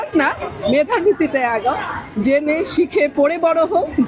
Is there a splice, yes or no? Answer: no